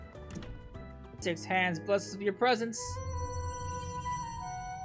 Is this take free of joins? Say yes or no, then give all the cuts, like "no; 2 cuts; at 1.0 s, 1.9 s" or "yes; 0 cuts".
no; 1 cut; at 1.2 s